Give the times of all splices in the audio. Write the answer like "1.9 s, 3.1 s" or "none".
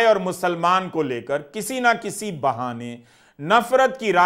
none